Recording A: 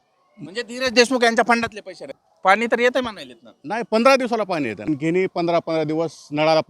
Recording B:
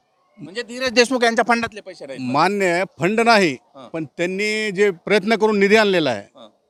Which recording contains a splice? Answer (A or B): A